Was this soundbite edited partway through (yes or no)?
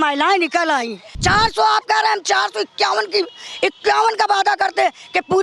yes